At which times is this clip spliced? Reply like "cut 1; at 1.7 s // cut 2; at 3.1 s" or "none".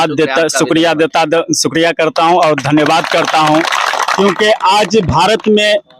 none